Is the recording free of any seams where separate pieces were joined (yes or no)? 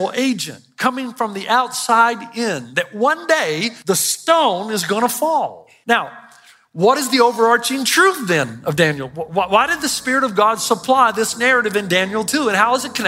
no